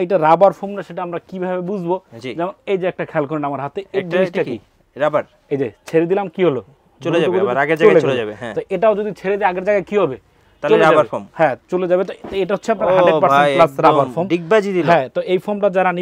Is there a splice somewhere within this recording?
no; 0 cuts

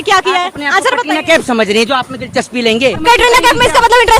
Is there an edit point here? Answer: yes; 1 cut; at 3.0 s

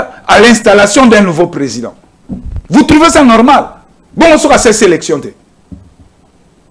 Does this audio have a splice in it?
no; 0 cuts

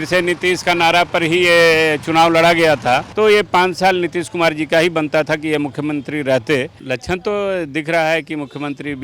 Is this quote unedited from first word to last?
no; 2 cuts; at 3.1 s, 6.8 s

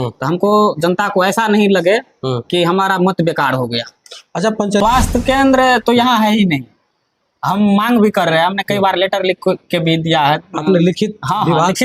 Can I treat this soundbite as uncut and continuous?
no; 1 cut; at 4.8 s

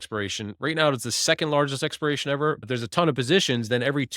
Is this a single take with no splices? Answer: no; 1 cut; at 2.6 s

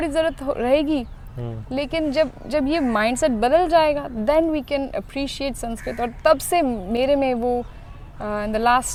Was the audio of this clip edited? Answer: no; 0 cuts

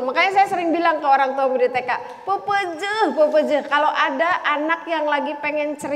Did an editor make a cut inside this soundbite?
no; 0 cuts

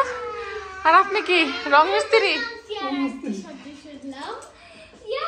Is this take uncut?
yes; 0 cuts

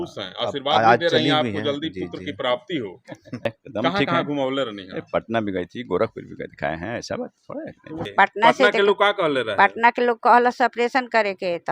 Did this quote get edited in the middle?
yes; 2 cuts; at 3.5 s, 8.1 s

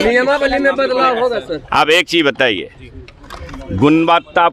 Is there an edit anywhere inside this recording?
yes; 1 cut; at 0.9 s

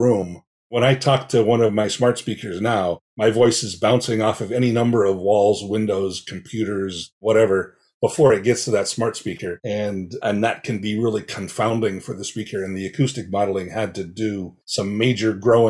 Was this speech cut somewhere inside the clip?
yes; 1 cut; at 14.6 s

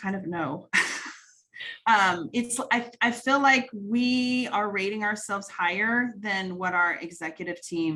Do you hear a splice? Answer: no; 0 cuts

